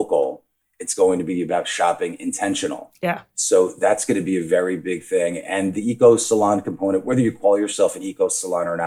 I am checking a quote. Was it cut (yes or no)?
no